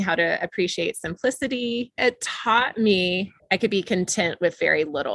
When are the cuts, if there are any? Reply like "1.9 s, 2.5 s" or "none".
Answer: 1.9 s, 3.3 s